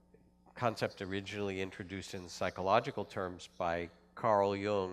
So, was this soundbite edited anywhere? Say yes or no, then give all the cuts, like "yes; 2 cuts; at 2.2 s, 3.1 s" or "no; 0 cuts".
yes; 1 cut; at 3.2 s